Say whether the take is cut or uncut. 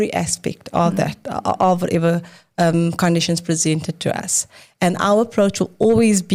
uncut